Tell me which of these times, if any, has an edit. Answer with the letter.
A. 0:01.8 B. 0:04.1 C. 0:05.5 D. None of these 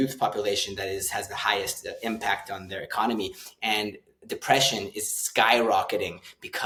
D